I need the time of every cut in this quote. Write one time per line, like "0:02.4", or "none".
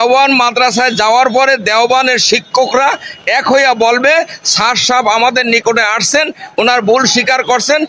none